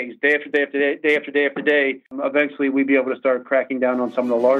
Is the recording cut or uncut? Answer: cut